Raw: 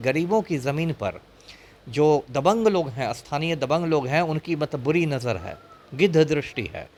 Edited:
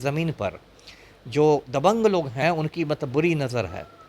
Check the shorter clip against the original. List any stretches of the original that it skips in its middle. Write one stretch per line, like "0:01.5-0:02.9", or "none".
0:03.0-0:04.1